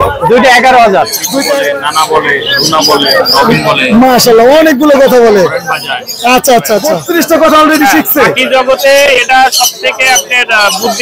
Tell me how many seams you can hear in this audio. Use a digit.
2